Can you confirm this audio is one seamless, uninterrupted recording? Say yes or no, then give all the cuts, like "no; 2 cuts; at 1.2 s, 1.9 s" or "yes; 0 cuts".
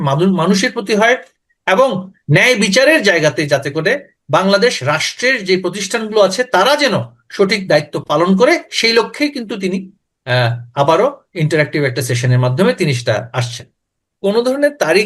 no; 1 cut; at 14.1 s